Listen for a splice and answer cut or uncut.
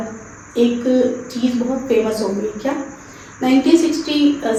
uncut